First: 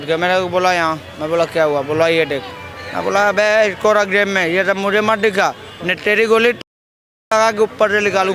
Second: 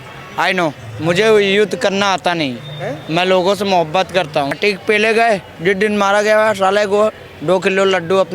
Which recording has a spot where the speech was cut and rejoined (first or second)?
second